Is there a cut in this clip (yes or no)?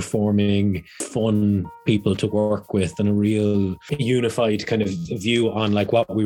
yes